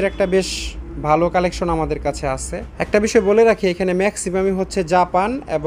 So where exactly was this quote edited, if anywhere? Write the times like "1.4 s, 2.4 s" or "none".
2.6 s